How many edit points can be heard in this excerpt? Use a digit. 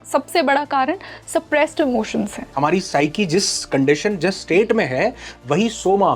1